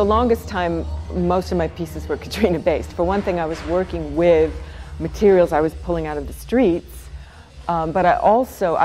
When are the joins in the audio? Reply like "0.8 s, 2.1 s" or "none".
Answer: none

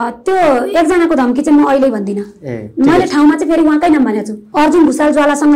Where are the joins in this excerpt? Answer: 4.4 s

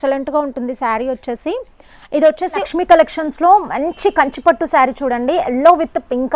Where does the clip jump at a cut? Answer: 2.6 s

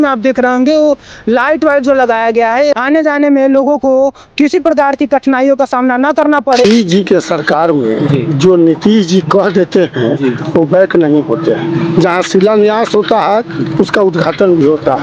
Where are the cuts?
6.6 s

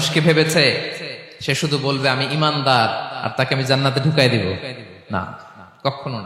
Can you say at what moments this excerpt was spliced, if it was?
none

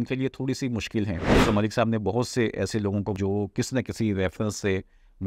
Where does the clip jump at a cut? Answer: 1.3 s, 3.2 s

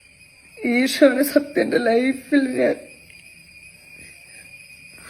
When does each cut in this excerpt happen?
none

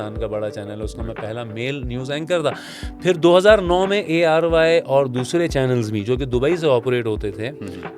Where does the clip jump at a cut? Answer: none

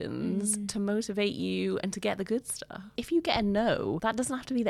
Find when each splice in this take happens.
2.9 s

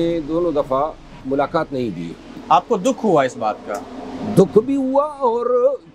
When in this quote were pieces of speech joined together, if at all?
1.2 s, 2.3 s

